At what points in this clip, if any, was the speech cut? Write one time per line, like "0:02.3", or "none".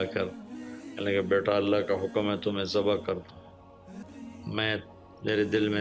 0:04.1